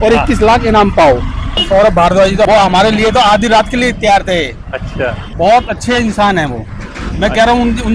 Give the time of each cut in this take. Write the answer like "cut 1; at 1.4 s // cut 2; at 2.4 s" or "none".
cut 1; at 1.6 s // cut 2; at 2.5 s // cut 3; at 5.2 s